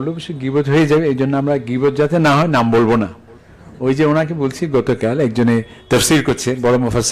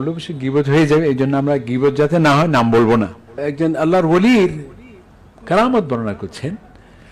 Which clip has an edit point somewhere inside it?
second; 1 cut; at 3.4 s

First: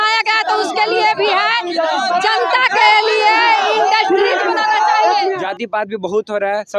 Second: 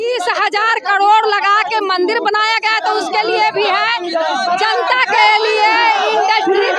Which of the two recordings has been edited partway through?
first; 1 cut; at 5.4 s

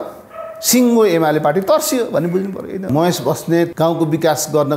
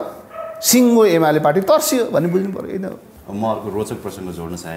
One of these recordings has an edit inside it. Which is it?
first; 2 cuts; at 2.9 s, 3.7 s

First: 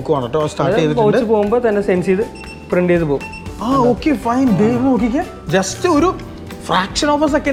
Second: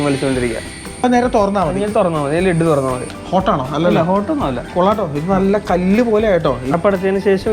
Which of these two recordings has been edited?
second; 3 cuts; at 1.0 s, 3.1 s, 6.7 s

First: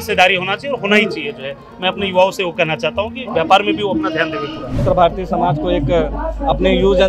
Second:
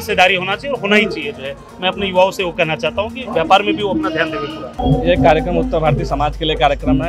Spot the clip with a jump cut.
first; 1 cut; at 4.8 s

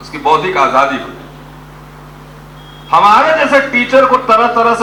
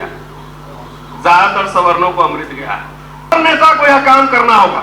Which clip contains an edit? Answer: second; 1 cut; at 3.3 s

